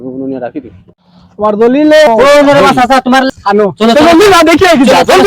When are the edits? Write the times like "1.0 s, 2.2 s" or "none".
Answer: 2.1 s, 3.3 s